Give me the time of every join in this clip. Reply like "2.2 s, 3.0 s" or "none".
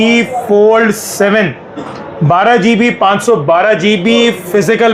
none